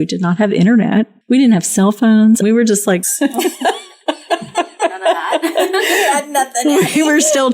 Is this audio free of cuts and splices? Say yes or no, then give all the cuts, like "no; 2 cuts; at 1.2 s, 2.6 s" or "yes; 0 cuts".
no; 1 cut; at 1.1 s